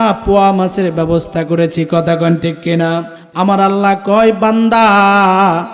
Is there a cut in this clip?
yes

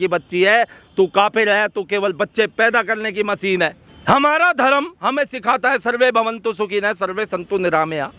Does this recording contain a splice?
yes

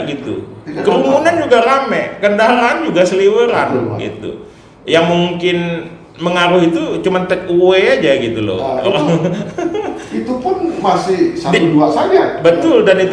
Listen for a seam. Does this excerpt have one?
no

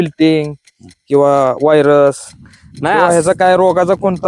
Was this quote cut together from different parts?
no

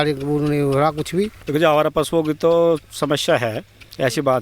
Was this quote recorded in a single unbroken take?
no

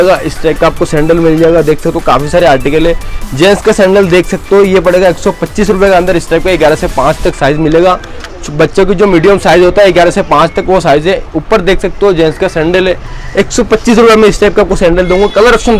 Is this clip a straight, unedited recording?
yes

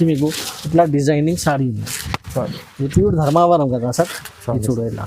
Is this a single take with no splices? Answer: yes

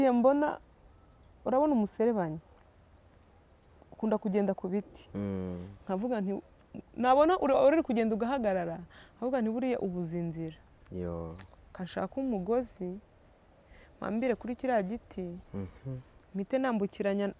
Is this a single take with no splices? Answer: yes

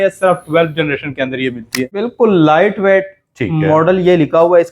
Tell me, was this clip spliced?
yes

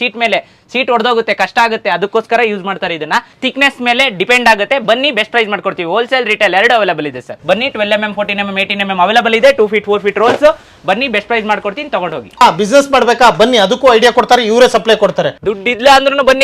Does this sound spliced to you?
yes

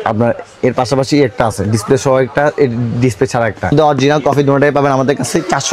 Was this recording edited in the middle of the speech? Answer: yes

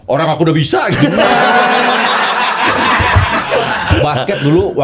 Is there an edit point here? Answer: yes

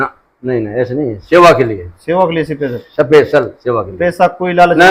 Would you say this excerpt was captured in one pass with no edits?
yes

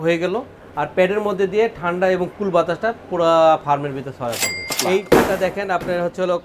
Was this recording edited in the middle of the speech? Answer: yes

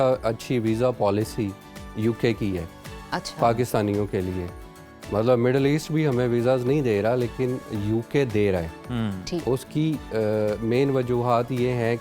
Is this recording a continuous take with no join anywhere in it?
yes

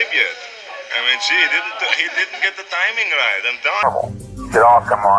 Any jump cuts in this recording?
yes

